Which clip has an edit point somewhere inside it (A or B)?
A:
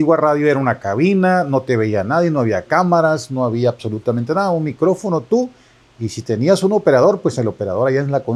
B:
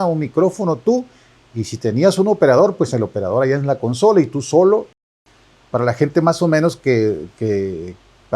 B